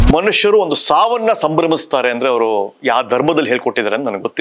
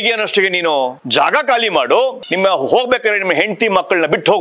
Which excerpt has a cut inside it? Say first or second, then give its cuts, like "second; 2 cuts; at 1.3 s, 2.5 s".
second; 2 cuts; at 1.0 s, 2.2 s